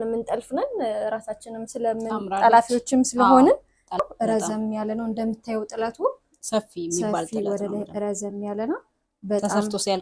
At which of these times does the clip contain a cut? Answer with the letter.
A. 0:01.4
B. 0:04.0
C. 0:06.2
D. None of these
B